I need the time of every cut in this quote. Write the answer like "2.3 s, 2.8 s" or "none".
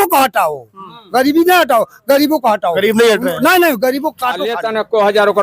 4.5 s